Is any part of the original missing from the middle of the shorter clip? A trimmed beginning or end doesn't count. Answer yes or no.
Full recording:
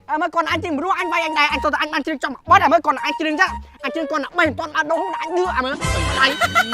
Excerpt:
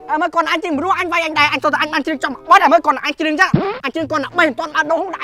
no